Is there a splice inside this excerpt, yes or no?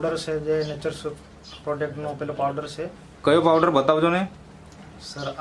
no